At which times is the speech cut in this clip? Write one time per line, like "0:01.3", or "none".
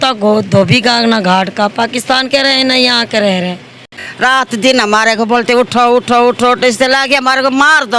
0:04.0